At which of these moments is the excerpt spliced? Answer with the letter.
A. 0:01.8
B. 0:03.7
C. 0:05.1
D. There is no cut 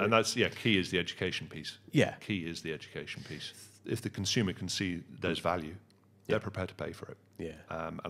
B